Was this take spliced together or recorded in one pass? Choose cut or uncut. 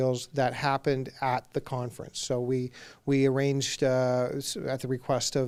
uncut